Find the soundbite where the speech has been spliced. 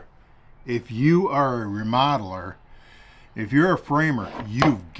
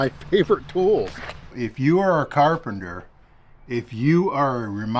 second; 1 cut; at 1.5 s

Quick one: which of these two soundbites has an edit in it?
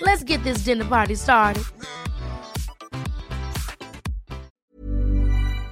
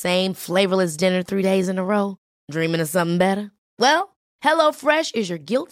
first; 1 cut; at 4.5 s

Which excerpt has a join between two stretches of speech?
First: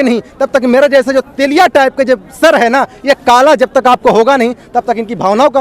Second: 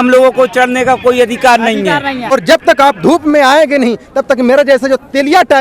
second; 1 cut; at 2.3 s

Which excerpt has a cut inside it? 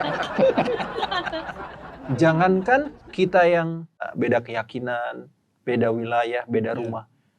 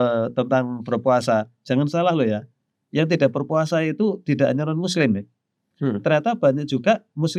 first; 3 cuts; at 1.6 s, 3.0 s, 4.1 s

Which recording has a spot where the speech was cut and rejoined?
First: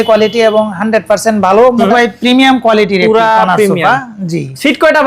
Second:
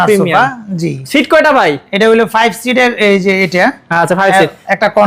first; 1 cut; at 1.9 s

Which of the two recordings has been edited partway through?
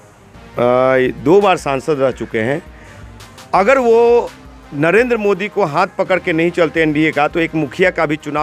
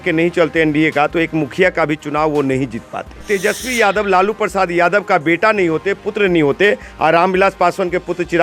second; 1 cut; at 3.2 s

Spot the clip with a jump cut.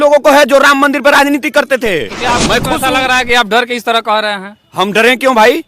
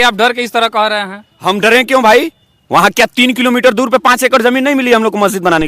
first; 1 cut; at 2.4 s

